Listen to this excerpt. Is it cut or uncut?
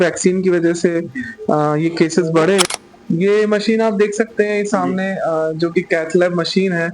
cut